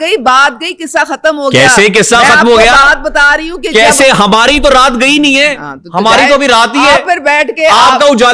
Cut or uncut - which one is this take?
uncut